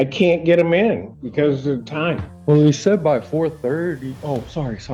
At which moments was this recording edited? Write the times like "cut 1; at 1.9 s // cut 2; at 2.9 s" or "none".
cut 1; at 2.3 s

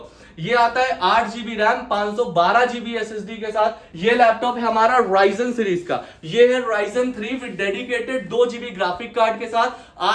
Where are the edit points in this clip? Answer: cut 1; at 3.9 s

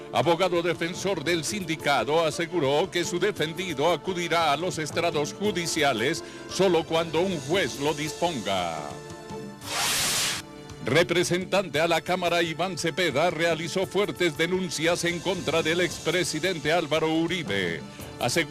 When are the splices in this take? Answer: cut 1; at 5.3 s

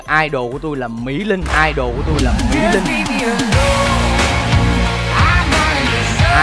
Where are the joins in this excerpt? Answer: none

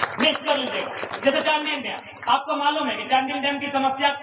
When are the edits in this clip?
none

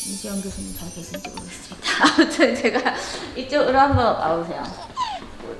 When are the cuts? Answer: none

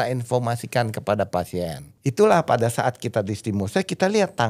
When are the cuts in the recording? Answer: cut 1; at 1.9 s

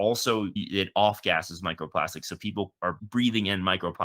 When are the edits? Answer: cut 1; at 3.0 s

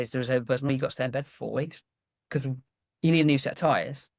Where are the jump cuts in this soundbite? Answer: none

